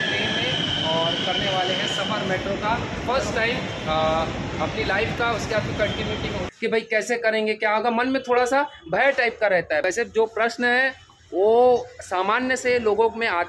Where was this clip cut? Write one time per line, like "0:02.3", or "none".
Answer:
0:06.4
0:09.8

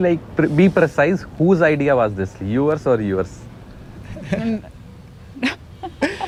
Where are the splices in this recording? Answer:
none

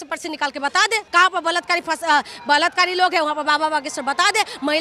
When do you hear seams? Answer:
0:01.0

